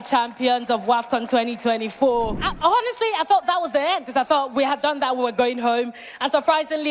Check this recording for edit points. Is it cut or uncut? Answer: cut